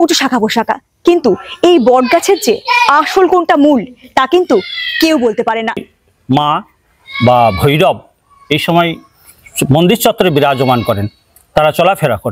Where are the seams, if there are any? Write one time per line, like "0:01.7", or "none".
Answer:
0:05.9